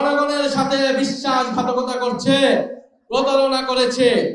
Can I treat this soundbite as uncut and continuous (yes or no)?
yes